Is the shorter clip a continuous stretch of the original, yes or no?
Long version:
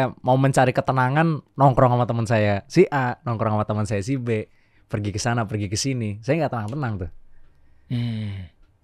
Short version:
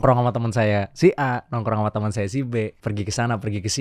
no